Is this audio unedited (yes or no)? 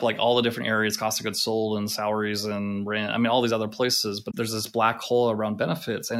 no